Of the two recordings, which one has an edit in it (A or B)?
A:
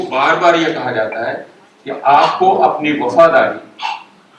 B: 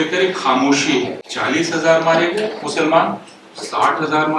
B